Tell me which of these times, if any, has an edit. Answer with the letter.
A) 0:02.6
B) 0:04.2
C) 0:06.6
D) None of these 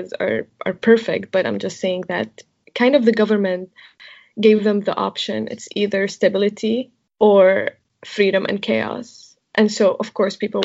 A